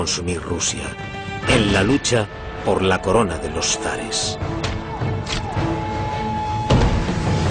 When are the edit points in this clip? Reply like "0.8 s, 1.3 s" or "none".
4.8 s